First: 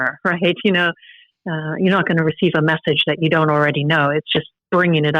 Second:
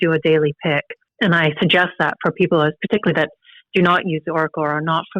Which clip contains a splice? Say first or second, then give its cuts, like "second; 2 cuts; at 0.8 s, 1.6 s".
second; 1 cut; at 1.0 s